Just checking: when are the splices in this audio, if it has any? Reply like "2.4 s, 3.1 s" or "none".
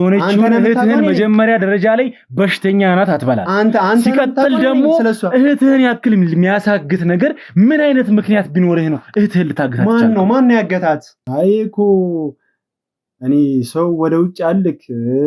11.2 s